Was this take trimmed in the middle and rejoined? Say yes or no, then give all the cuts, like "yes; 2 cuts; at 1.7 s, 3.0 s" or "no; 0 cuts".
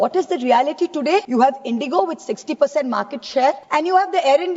yes; 2 cuts; at 1.3 s, 3.6 s